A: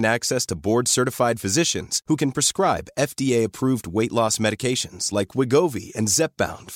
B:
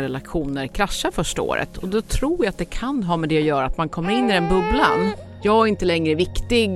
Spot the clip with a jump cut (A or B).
B